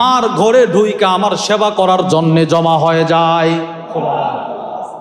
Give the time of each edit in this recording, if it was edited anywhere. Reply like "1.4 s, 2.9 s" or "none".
none